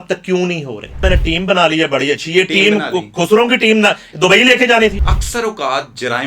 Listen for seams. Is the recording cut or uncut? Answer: cut